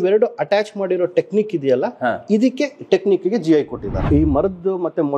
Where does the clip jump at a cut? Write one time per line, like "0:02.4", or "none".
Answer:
0:04.0